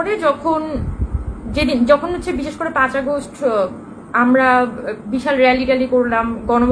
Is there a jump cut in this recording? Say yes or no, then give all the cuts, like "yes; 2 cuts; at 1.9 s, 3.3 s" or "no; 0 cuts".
no; 0 cuts